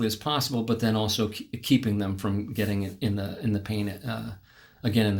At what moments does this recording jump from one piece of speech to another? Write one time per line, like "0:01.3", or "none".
none